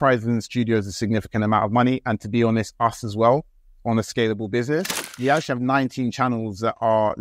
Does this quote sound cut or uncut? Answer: cut